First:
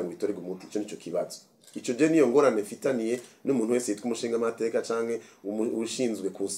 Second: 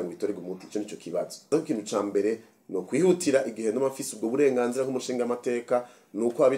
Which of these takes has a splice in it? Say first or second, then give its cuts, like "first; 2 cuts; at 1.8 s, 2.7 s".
second; 1 cut; at 1.5 s